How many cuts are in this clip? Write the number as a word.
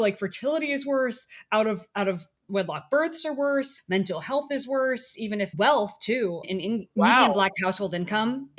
three